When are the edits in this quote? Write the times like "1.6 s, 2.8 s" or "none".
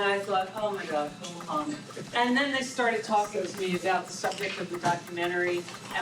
1.9 s